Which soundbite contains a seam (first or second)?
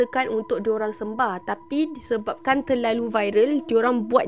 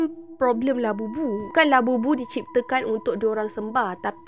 second